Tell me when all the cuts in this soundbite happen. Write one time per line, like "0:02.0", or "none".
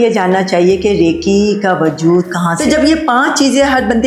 0:02.5